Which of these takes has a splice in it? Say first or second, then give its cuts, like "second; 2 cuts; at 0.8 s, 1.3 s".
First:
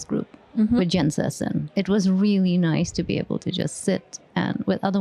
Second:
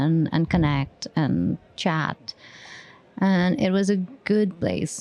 first; 1 cut; at 1.6 s